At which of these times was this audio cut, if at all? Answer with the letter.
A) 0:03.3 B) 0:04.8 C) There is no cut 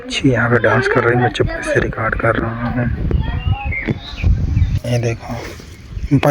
B